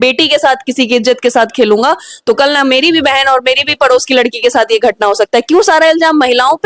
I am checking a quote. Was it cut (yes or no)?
no